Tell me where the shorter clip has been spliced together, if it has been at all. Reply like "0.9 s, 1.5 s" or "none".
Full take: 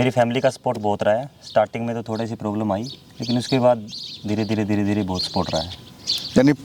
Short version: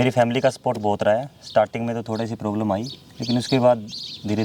none